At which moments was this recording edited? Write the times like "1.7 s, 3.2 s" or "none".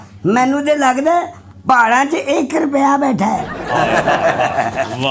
none